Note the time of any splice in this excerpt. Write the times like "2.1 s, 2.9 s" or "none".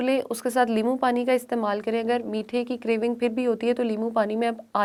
none